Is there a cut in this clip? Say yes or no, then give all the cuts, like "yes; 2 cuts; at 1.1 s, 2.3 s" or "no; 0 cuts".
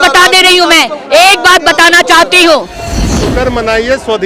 yes; 1 cut; at 3.1 s